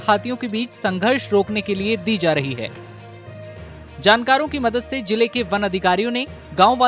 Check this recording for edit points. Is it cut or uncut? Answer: cut